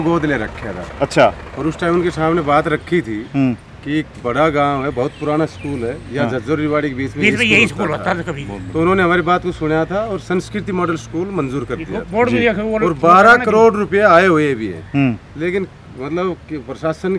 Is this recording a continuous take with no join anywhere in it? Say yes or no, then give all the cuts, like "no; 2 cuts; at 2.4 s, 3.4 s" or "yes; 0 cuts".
yes; 0 cuts